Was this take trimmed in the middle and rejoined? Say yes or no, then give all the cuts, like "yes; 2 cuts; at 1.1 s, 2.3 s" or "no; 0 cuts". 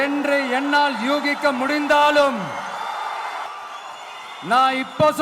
yes; 1 cut; at 3.5 s